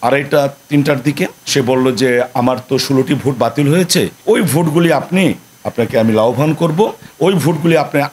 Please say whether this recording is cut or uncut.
uncut